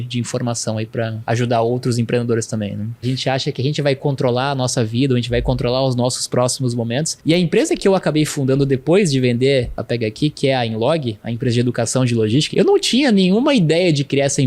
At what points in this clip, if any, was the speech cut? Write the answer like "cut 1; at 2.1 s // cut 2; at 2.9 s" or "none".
cut 1; at 1.2 s // cut 2; at 3.0 s // cut 3; at 7.1 s // cut 4; at 9.8 s // cut 5; at 12.5 s